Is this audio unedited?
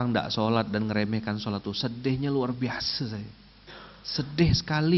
yes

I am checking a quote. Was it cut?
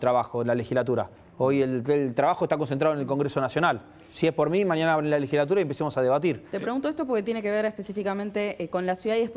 no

